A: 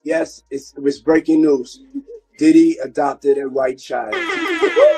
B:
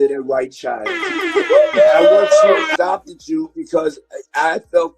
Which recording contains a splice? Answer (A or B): B